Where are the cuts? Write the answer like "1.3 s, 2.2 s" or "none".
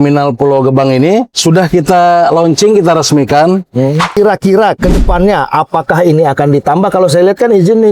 1.3 s, 4.1 s